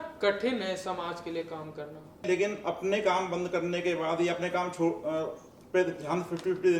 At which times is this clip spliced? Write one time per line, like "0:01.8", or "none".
0:02.3